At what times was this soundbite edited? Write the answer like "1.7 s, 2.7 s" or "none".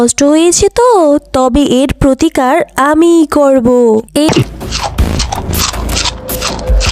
4.3 s

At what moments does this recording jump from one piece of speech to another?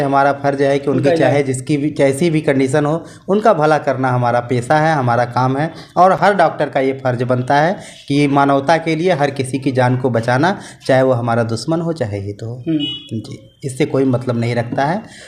none

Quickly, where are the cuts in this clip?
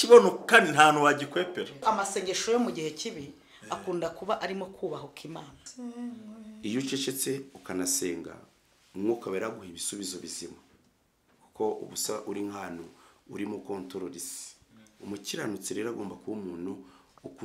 1.8 s, 5.6 s

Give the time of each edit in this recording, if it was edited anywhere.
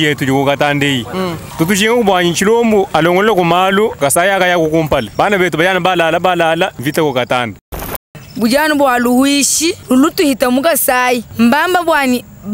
1.4 s, 2.9 s, 3.9 s, 5.1 s, 6.8 s, 8.0 s, 9.8 s, 11.3 s

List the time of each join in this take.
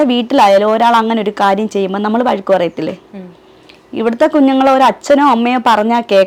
none

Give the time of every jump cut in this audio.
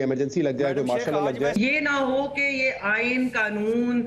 1.5 s

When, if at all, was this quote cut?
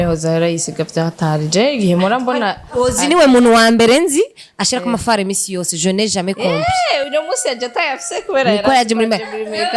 none

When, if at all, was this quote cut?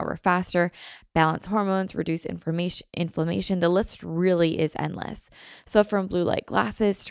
none

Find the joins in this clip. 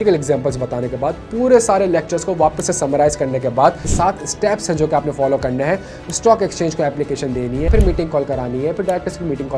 3.9 s, 7.7 s

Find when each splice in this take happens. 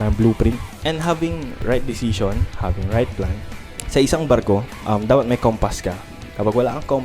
1.3 s, 4.7 s

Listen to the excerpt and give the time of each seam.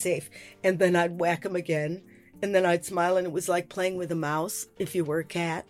none

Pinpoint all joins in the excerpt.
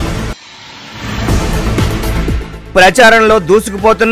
1.7 s

